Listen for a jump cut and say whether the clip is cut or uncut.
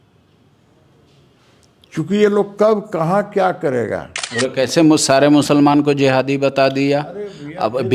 cut